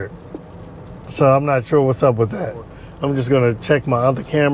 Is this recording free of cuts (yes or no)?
no